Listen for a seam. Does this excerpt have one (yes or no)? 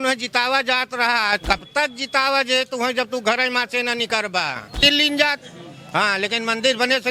yes